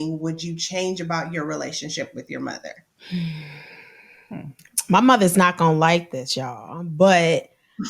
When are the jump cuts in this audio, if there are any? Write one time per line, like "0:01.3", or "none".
0:02.9

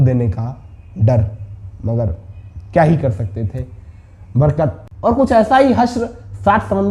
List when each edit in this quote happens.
0:04.9

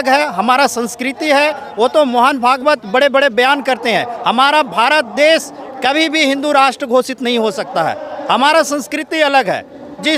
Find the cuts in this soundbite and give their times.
none

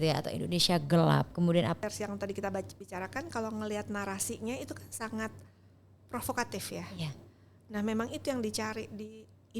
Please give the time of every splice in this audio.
0:01.8

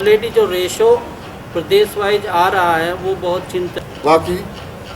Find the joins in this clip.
0:03.7

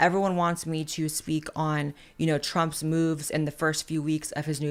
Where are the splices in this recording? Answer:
none

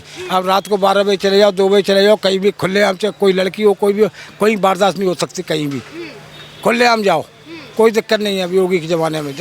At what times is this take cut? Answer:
none

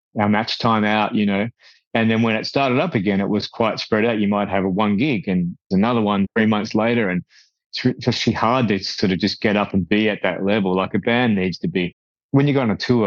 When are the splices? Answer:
none

